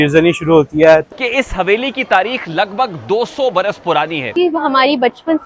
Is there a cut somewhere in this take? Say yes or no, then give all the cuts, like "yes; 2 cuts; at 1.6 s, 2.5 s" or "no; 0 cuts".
yes; 2 cuts; at 1.1 s, 4.2 s